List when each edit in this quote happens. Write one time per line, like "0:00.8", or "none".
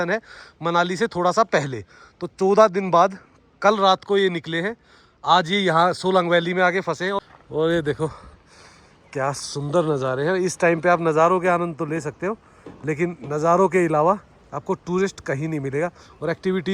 0:07.2

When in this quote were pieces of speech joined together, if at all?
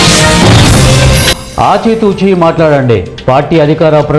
0:01.4

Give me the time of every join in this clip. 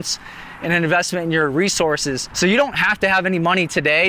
0:02.3

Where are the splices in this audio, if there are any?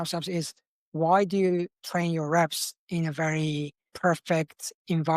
0:03.9

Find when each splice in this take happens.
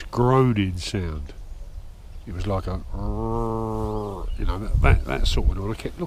none

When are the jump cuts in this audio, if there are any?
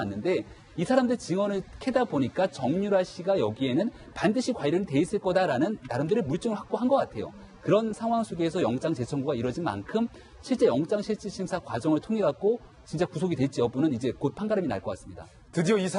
0:10.3

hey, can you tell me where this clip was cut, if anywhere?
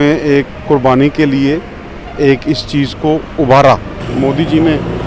0:04.0

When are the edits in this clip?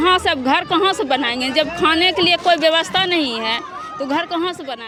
none

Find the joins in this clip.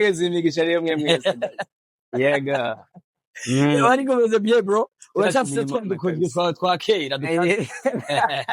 none

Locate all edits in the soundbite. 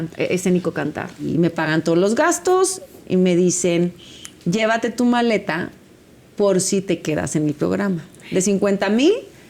0:01.3
0:08.2

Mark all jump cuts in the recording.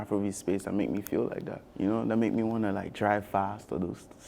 0:01.6

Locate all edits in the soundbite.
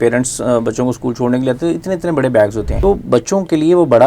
0:02.7

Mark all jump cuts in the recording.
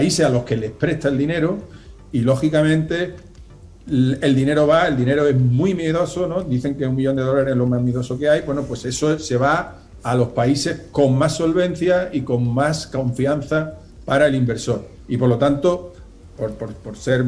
none

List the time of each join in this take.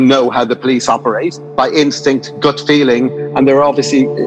0:01.4
0:03.2

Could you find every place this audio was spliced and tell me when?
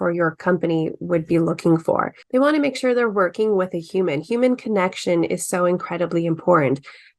0:02.1

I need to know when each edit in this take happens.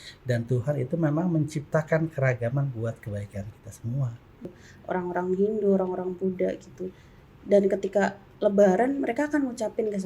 0:04.3

